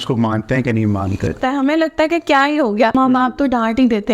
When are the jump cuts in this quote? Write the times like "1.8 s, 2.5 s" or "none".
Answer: 1.4 s, 2.9 s